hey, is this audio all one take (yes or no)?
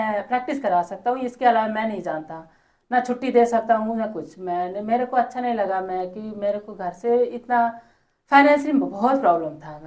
yes